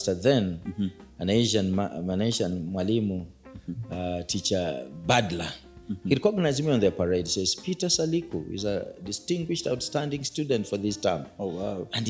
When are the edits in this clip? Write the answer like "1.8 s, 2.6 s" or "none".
none